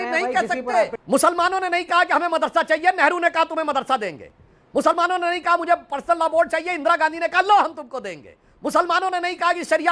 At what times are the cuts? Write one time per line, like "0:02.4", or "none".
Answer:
0:01.0